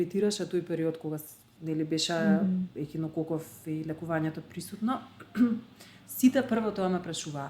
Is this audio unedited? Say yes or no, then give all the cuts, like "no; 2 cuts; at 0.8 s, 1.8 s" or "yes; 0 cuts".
yes; 0 cuts